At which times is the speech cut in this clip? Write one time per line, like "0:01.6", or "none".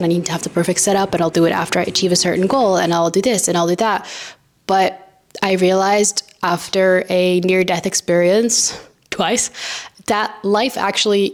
none